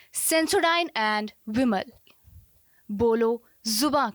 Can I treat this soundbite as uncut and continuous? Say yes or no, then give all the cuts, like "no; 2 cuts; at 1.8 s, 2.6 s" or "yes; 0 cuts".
yes; 0 cuts